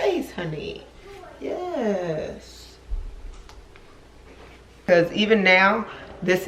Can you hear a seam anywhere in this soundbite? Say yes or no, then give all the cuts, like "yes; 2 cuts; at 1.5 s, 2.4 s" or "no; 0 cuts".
yes; 1 cut; at 4.9 s